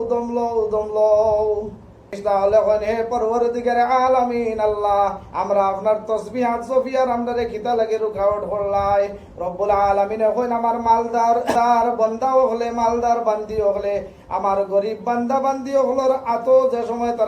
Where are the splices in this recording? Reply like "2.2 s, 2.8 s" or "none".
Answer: 2.2 s, 11.5 s